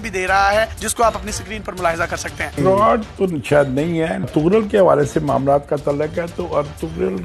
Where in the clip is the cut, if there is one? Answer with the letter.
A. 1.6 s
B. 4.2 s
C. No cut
B